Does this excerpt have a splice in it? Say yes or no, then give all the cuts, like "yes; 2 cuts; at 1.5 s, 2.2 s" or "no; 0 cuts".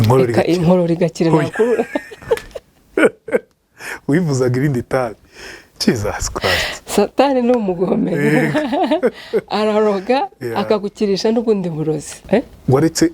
yes; 1 cut; at 12.1 s